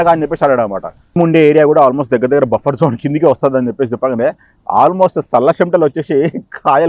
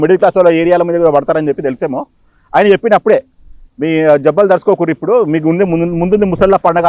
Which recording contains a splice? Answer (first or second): first